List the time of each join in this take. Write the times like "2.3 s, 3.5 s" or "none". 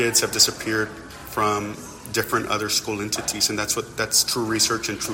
none